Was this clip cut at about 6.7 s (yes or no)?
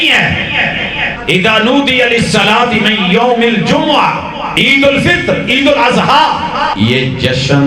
yes